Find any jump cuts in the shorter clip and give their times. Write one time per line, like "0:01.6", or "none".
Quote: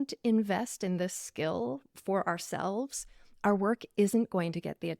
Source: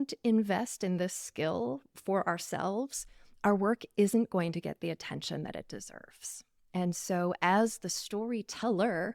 none